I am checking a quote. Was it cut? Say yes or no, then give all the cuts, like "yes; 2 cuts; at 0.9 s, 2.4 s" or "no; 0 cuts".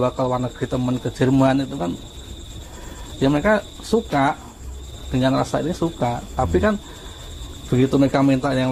no; 0 cuts